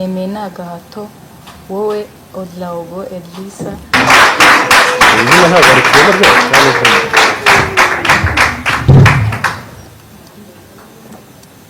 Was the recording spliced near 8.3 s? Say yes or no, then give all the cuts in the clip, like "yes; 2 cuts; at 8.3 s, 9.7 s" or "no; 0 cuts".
no; 1 cut; at 3.9 s